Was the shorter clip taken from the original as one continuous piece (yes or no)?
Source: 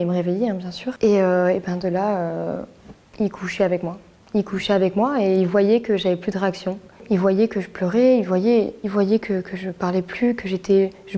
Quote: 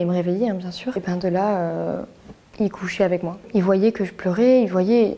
no